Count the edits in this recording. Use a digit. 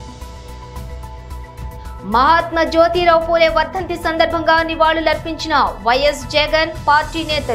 0